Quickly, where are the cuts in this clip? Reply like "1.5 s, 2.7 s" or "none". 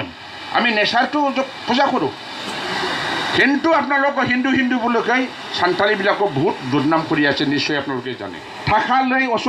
8.1 s